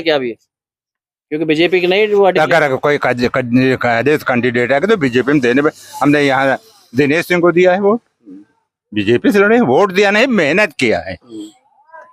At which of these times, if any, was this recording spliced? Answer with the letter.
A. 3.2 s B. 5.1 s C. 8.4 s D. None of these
D